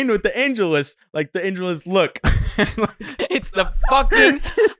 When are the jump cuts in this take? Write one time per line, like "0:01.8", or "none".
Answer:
0:03.2